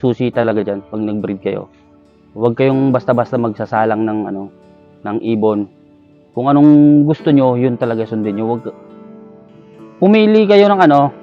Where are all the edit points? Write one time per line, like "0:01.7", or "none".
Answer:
none